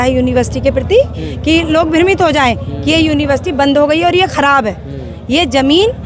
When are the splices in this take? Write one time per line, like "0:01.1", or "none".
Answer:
none